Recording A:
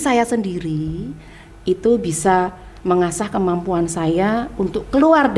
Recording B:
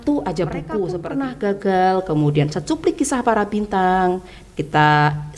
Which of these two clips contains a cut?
B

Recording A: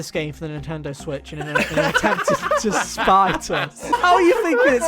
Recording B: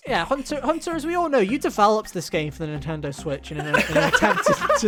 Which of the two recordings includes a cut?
A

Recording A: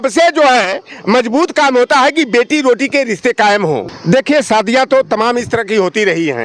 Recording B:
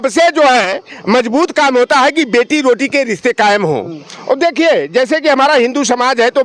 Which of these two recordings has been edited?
A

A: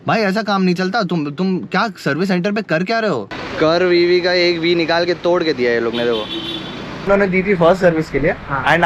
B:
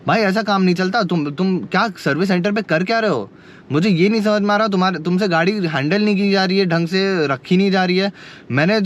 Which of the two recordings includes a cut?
A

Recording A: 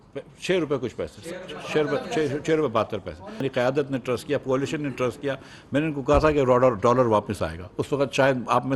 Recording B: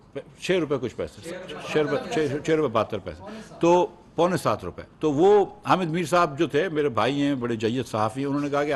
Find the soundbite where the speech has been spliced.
A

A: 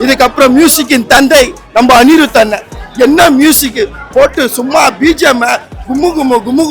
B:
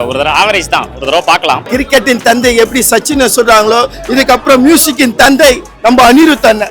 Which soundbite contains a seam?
B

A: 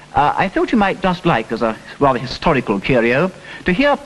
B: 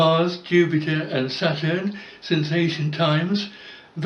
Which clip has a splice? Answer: A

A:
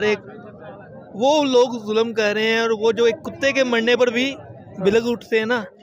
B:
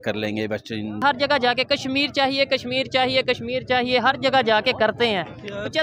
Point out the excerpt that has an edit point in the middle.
B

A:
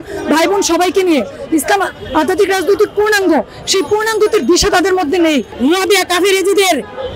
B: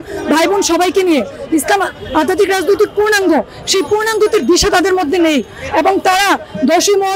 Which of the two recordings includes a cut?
A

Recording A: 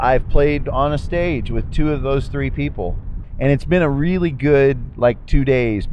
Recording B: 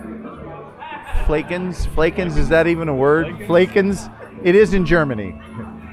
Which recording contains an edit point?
A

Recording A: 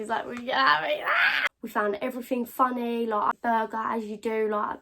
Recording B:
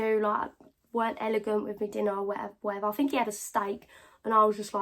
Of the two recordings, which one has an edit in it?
A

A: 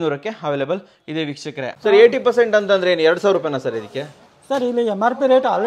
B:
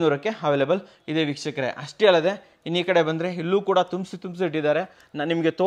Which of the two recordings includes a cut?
A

